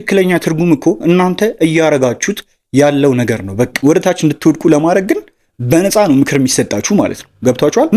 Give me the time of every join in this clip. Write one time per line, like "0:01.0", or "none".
0:03.8